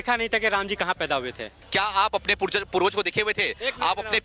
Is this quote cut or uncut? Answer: cut